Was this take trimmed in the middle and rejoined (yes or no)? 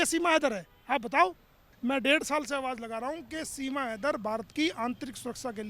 yes